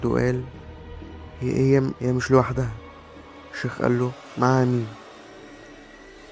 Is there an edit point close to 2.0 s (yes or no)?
yes